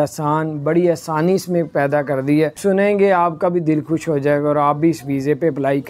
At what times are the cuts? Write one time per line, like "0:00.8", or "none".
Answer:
0:02.6